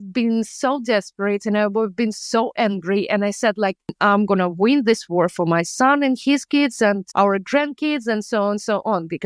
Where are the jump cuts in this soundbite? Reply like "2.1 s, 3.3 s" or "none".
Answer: 3.9 s